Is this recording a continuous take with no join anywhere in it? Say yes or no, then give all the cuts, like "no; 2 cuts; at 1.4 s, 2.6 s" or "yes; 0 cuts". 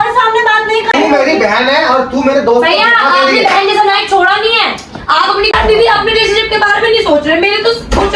no; 2 cuts; at 0.9 s, 5.5 s